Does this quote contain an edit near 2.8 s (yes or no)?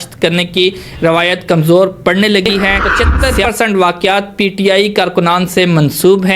yes